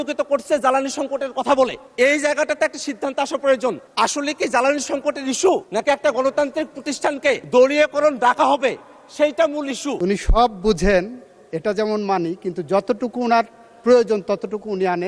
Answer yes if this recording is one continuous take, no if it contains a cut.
no